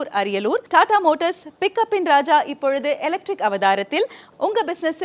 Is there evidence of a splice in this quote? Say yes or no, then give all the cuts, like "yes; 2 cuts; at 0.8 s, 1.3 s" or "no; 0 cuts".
no; 0 cuts